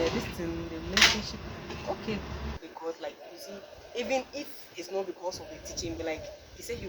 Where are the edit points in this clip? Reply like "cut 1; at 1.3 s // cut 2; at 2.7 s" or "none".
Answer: cut 1; at 2.6 s